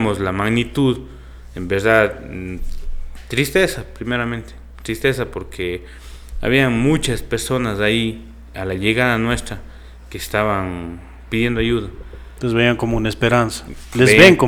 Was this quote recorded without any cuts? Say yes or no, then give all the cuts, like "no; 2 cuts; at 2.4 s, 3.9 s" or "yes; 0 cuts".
yes; 0 cuts